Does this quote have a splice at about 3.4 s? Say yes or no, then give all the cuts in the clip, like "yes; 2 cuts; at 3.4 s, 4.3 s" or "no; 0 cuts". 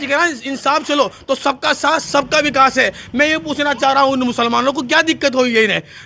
no; 0 cuts